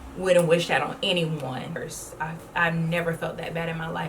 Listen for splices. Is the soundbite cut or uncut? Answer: cut